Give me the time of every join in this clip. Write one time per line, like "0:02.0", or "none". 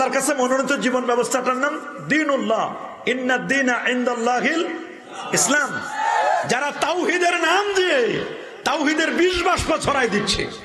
0:06.0